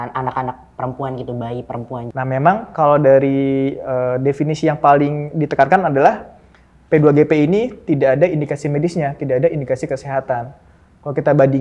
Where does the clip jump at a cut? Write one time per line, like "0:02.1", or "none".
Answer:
0:02.1